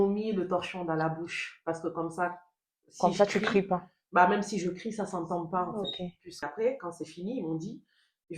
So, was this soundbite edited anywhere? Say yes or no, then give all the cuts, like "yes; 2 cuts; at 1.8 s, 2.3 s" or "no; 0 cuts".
yes; 1 cut; at 6.4 s